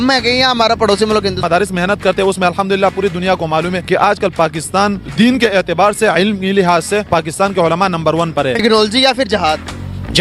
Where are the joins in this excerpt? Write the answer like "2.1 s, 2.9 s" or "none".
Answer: 3.4 s, 8.6 s